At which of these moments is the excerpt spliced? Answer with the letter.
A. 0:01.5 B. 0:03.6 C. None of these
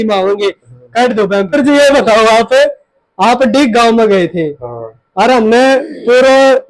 A